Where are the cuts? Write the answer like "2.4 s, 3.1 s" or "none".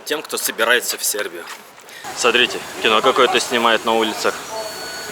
1.6 s